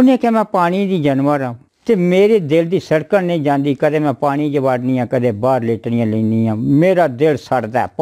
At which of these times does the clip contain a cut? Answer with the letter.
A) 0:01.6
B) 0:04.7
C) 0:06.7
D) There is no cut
D